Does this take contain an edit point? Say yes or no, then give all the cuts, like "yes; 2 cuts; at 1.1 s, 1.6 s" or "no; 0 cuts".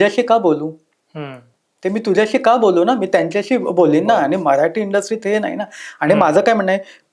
no; 0 cuts